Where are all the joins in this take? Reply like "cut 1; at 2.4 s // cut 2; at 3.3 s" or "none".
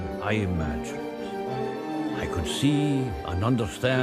cut 1; at 3.1 s